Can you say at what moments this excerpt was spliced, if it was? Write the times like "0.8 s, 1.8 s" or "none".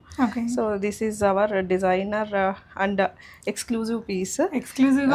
none

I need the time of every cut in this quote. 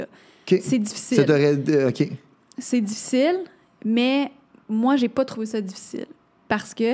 none

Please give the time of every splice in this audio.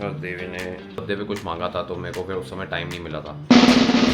1.0 s

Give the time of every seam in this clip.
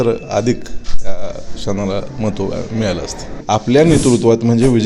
3.3 s

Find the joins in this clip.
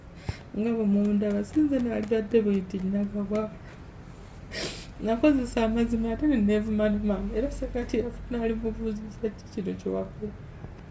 none

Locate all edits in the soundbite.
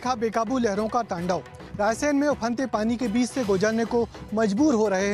none

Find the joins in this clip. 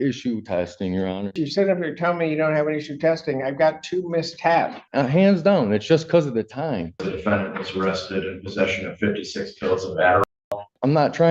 1.4 s, 4.8 s, 7.1 s, 10.3 s

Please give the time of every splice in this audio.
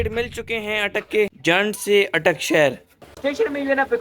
3.0 s

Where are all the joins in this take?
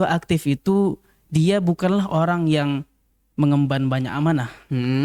none

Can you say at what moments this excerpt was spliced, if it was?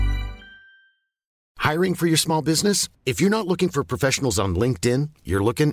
1.3 s

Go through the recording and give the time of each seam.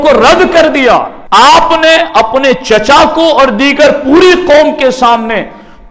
1.2 s

